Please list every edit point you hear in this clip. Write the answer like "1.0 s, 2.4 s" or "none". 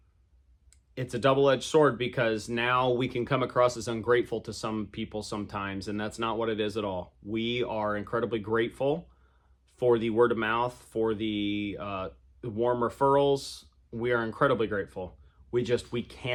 none